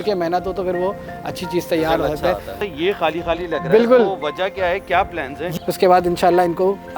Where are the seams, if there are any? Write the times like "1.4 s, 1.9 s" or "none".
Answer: 2.6 s, 5.4 s